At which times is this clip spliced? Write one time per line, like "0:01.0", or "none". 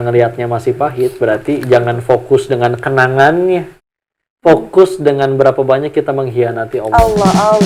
none